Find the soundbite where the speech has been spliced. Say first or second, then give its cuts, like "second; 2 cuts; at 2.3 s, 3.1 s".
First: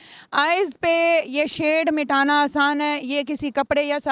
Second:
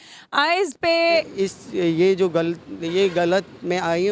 second; 1 cut; at 1.3 s